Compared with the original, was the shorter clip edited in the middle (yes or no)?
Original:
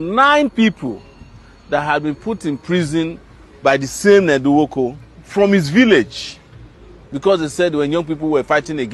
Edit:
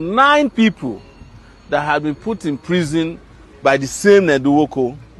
no